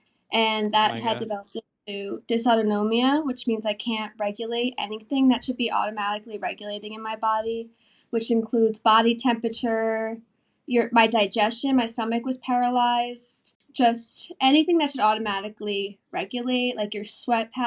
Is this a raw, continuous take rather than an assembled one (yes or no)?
yes